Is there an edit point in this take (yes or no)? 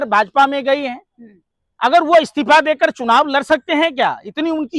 no